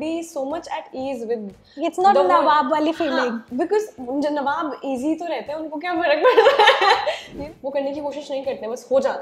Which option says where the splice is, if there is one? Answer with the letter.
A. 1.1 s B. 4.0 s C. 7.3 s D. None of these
C